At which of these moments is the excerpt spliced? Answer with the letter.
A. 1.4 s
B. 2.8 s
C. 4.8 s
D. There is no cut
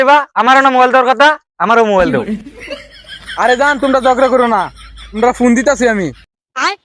D